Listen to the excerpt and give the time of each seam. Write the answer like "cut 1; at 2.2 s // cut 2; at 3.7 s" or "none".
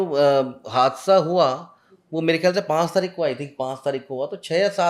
none